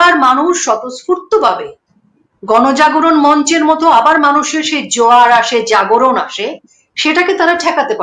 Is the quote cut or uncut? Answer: uncut